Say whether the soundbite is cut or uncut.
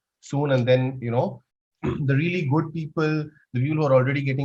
cut